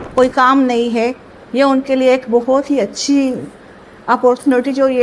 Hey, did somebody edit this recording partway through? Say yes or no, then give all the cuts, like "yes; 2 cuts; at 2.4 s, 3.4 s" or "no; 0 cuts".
no; 0 cuts